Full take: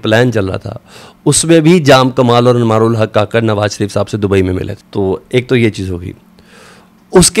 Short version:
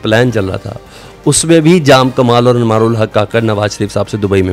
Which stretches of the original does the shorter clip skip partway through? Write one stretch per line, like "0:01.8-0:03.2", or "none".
none